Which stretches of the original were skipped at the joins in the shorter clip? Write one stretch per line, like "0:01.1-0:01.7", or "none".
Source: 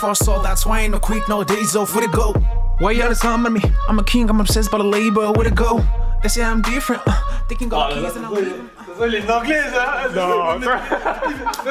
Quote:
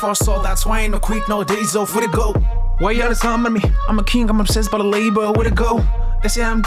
none